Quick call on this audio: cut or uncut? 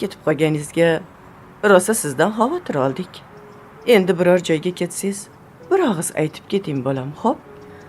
uncut